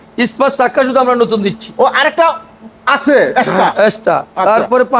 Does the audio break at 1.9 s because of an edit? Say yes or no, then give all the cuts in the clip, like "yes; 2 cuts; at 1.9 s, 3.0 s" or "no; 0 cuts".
no; 0 cuts